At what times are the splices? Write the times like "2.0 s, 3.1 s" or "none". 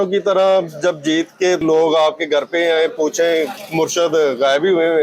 1.6 s, 3.6 s